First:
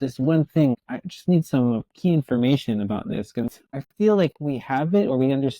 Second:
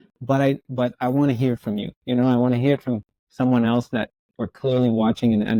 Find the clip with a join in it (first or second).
first